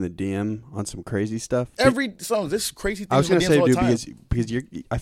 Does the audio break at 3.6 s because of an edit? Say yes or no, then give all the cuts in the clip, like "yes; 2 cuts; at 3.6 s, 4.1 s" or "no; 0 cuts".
no; 1 cut; at 1.7 s